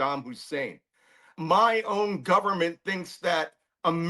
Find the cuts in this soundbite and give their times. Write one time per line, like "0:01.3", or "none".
0:01.4